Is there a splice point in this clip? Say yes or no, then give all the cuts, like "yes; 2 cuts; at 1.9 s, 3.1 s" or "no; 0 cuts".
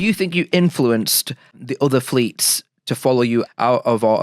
yes; 3 cuts; at 1.7 s, 2.7 s, 3.5 s